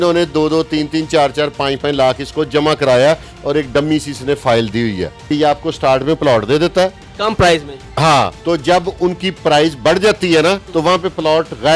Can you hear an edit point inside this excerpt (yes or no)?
yes